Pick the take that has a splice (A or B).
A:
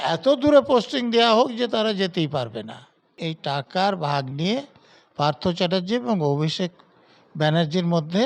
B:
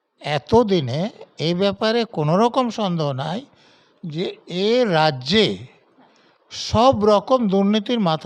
A